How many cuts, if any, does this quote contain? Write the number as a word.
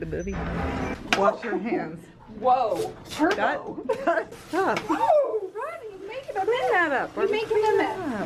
two